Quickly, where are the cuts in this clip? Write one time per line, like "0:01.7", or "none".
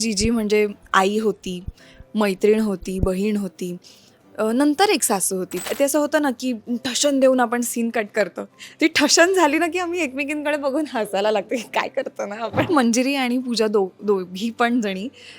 0:05.6
0:12.7